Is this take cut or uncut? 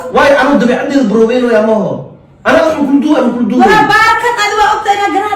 uncut